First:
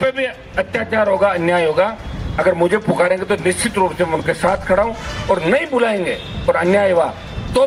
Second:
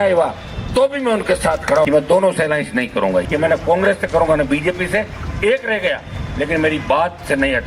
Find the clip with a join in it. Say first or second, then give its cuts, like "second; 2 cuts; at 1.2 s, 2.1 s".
second; 2 cuts; at 1.9 s, 3.3 s